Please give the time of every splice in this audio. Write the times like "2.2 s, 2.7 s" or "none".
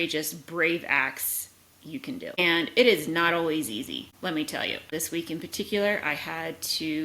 2.4 s, 4.1 s, 4.9 s